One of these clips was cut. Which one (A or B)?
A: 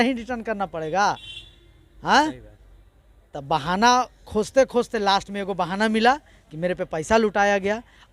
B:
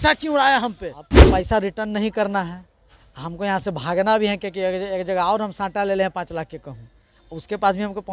B